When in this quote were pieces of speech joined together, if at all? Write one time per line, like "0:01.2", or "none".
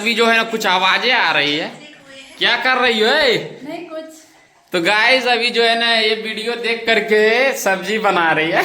none